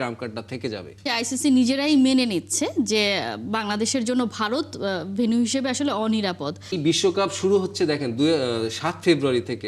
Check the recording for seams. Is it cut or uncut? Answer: cut